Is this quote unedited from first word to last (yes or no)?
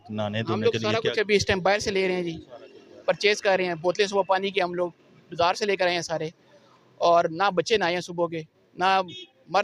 yes